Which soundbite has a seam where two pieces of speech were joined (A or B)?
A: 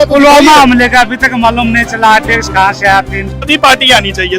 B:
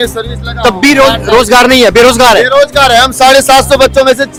A